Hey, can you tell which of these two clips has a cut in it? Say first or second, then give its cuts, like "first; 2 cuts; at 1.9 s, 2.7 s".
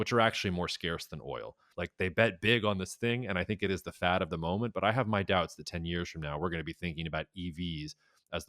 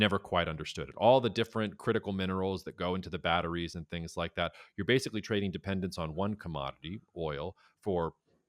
first; 1 cut; at 1.7 s